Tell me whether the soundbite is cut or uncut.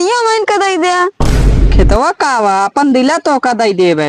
cut